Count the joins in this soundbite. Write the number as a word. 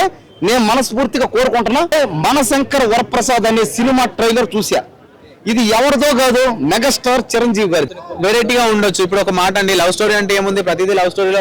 two